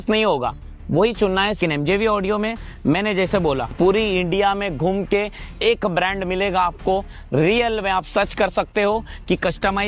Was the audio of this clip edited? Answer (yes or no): yes